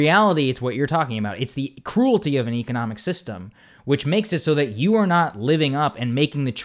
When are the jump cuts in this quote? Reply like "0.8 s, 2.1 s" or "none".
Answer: none